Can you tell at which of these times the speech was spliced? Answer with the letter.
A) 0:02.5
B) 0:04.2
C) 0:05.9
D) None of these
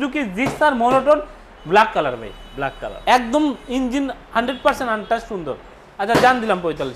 C